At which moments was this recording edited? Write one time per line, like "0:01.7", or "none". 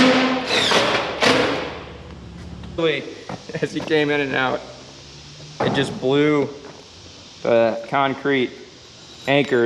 0:02.8